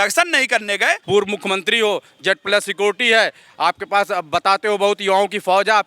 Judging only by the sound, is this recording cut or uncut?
cut